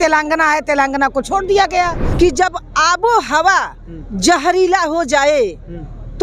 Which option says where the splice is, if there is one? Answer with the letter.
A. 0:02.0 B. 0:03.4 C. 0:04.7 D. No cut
A